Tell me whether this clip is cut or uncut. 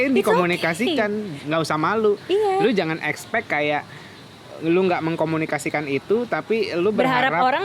uncut